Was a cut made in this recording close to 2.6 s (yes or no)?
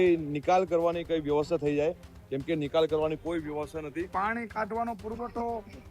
no